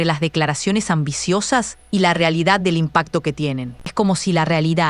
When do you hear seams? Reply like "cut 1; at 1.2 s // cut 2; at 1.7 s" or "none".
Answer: cut 1; at 3.9 s